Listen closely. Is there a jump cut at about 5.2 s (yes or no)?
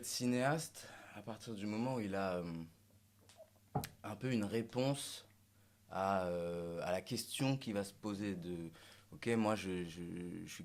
no